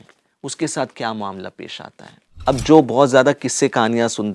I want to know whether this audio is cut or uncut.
cut